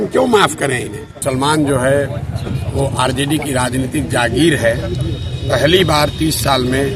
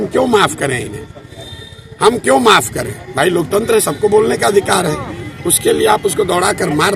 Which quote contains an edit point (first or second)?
first